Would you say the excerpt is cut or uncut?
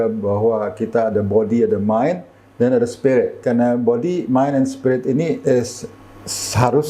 cut